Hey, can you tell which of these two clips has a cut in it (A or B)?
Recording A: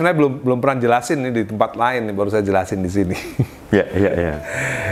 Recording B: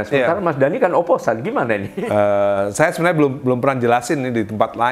B